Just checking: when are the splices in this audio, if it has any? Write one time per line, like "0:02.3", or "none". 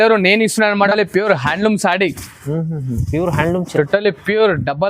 0:00.9